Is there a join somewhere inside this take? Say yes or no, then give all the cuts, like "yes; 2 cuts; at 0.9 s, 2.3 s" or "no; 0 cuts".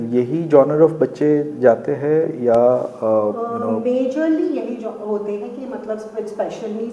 no; 0 cuts